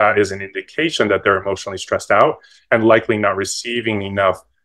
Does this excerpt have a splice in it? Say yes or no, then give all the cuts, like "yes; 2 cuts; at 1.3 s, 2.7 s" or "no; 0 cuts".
no; 0 cuts